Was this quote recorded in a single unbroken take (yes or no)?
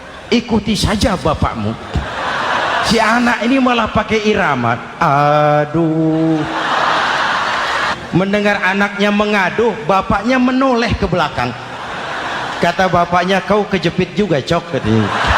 no